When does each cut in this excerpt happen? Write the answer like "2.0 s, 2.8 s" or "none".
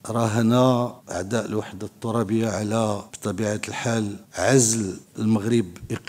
1.0 s, 3.1 s, 4.2 s, 5.0 s